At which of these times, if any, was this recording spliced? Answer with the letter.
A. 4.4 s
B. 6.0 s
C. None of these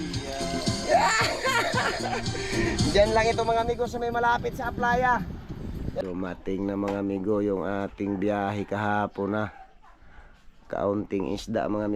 B